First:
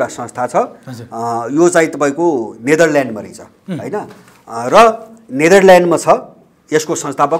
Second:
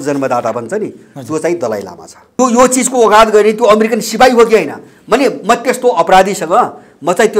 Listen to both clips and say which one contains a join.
second; 1 cut; at 2.4 s

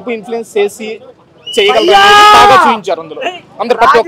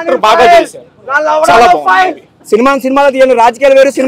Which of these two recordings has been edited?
second; 1 cut; at 2.4 s

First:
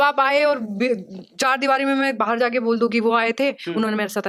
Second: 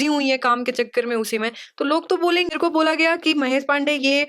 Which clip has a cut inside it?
second; 1 cut; at 2.5 s

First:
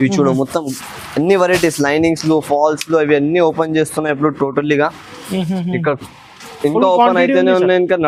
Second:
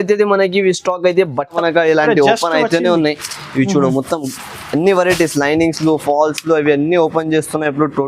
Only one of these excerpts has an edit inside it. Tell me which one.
second; 1 cut; at 1.5 s

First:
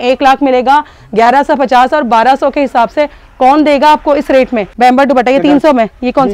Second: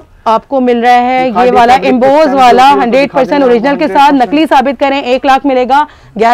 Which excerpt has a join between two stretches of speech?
first; 1 cut; at 4.6 s

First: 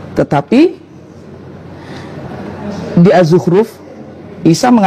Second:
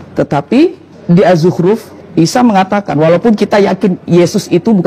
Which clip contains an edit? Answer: second; 2 cuts; at 0.9 s, 1.9 s

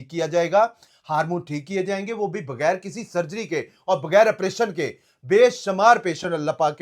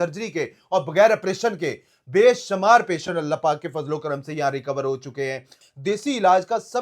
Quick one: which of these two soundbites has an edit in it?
second; 1 cut; at 5.5 s

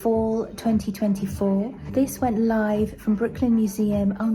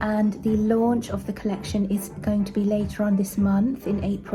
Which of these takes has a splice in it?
first; 1 cut; at 1.8 s

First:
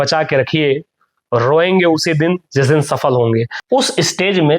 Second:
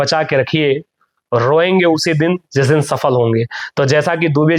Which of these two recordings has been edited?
first; 1 cut; at 3.6 s

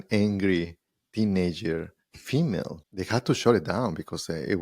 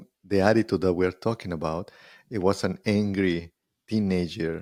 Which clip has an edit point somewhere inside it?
first; 1 cut; at 2.8 s

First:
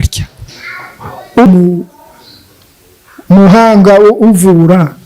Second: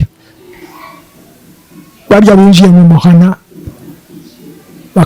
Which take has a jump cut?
first; 1 cut; at 1.5 s

